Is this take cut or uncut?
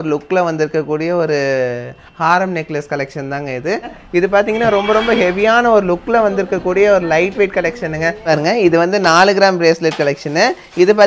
cut